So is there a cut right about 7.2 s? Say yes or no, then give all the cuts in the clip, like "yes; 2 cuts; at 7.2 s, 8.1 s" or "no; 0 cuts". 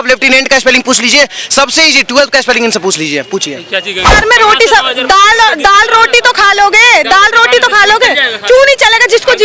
no; 1 cut; at 4.1 s